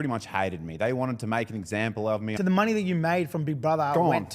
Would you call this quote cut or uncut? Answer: cut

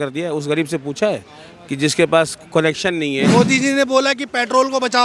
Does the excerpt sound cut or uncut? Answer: cut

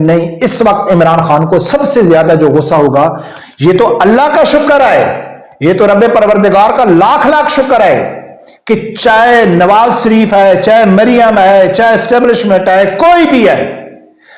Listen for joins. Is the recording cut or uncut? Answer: cut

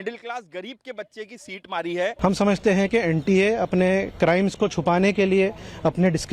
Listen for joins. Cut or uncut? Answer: cut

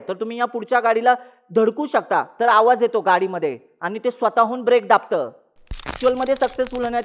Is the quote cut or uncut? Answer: cut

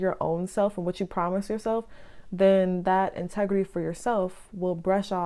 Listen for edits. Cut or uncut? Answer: uncut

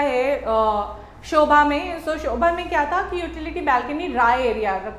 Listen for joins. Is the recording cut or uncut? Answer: uncut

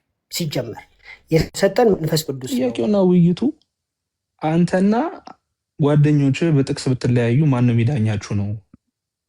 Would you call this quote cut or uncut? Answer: cut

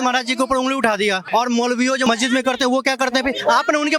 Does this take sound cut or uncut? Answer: cut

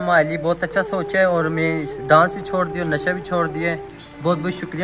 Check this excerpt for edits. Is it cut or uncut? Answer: uncut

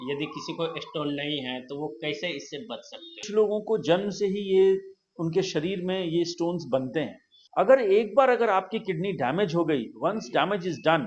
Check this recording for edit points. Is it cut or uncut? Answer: cut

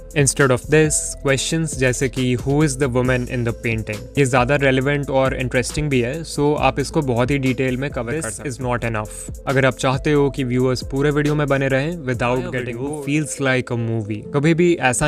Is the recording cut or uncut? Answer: cut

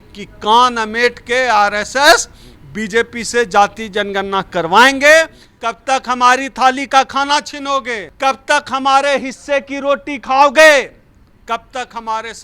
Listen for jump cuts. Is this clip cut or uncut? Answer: cut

